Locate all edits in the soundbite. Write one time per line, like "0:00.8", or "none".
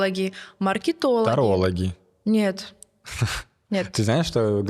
none